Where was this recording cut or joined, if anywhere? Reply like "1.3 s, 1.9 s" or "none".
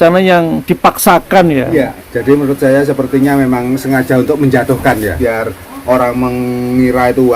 2.0 s, 5.7 s

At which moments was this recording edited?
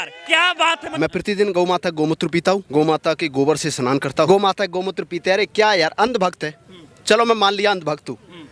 0.9 s, 2.7 s, 4.3 s

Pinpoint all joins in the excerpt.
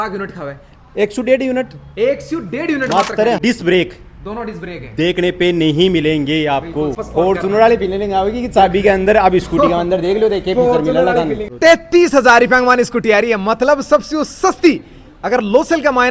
3.4 s, 7.0 s, 11.4 s

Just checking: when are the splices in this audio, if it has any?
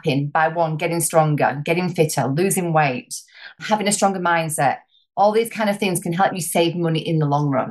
3.6 s, 6.3 s

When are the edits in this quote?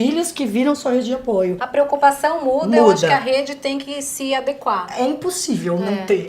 1.6 s

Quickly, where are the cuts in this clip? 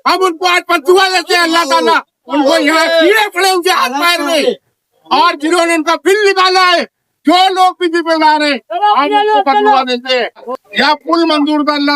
10.5 s

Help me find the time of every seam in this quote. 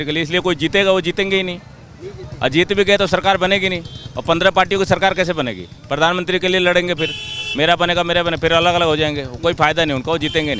none

